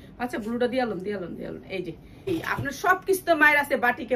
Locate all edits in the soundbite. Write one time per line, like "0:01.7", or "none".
0:02.3